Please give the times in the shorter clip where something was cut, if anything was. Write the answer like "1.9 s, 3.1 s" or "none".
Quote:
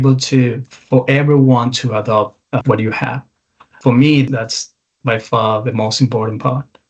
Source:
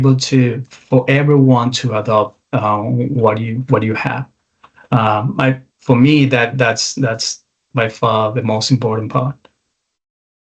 2.6 s, 3.7 s, 4.3 s